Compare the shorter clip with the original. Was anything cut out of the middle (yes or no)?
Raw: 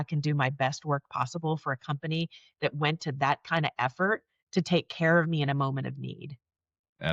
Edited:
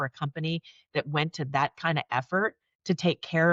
no